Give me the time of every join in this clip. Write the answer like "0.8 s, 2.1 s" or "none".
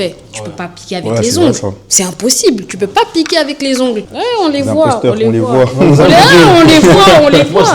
4.1 s

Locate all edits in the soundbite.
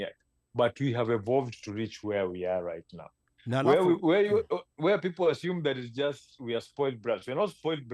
none

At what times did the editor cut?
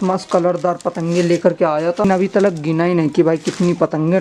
2.1 s

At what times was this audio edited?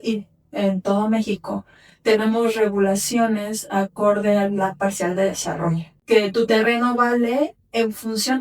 5.9 s

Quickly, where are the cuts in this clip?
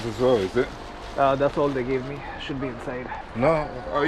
3.1 s

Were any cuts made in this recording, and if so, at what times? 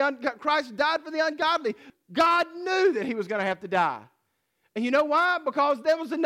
1.8 s

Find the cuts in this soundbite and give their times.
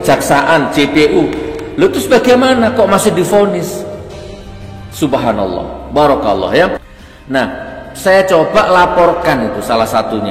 6.9 s

